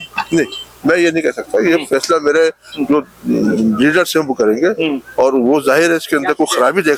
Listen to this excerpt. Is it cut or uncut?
uncut